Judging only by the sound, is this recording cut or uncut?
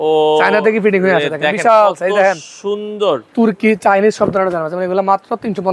cut